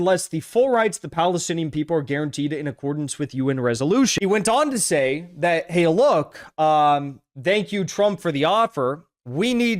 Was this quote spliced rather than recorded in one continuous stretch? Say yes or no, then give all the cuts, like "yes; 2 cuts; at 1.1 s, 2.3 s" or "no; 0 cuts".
yes; 1 cut; at 4.1 s